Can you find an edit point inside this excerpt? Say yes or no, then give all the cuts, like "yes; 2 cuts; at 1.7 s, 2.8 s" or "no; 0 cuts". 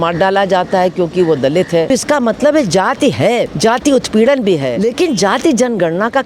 yes; 3 cuts; at 1.9 s, 3.5 s, 4.7 s